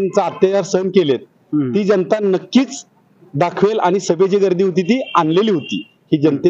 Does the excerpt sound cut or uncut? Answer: uncut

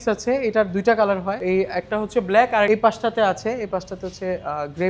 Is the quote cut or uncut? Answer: cut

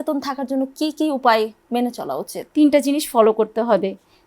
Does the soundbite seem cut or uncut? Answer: cut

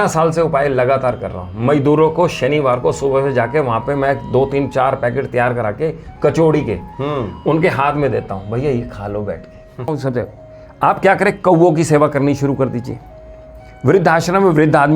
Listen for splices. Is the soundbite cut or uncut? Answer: cut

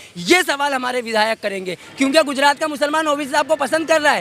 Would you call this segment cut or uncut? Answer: cut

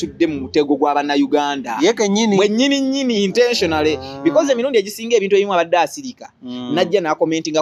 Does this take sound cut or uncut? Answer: uncut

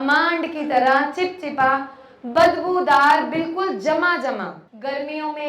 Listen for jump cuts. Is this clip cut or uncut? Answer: cut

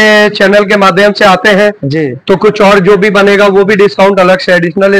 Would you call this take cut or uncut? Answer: uncut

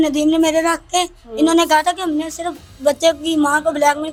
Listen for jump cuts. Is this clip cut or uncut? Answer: uncut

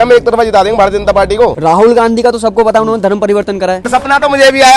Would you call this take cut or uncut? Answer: cut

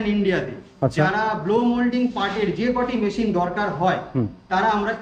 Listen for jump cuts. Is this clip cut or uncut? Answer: uncut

